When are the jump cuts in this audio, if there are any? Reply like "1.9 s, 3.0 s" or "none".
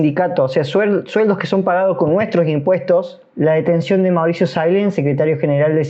3.2 s